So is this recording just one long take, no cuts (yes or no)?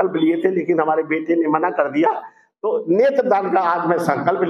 yes